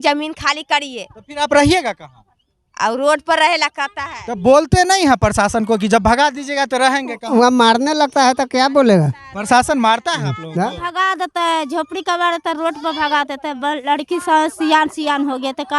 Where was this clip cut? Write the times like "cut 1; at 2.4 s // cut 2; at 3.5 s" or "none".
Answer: cut 1; at 10.9 s